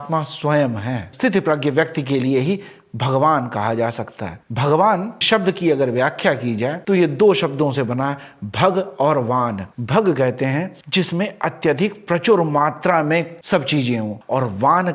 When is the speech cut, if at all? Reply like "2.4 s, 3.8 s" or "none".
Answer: none